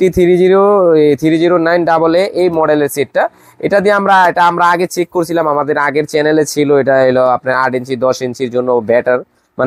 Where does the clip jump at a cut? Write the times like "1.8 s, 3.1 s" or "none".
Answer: none